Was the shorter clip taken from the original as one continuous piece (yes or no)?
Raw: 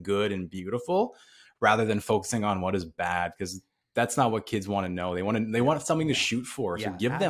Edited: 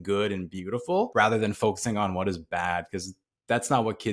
no